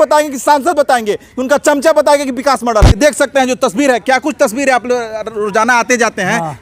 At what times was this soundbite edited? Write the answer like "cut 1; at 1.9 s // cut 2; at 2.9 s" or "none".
cut 1; at 2.9 s

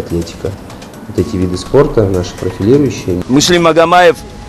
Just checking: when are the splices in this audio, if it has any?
cut 1; at 3.2 s

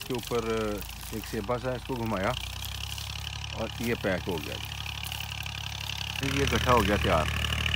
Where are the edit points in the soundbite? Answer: cut 1; at 6.2 s

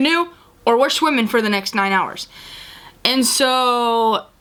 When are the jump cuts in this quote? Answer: none

